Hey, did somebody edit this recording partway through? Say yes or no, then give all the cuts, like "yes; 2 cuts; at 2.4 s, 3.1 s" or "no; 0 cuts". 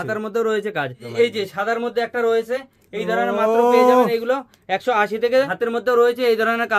yes; 2 cuts; at 1.1 s, 5.5 s